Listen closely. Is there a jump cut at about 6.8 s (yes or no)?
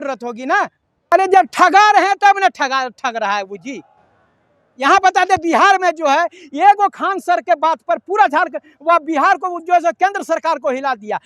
no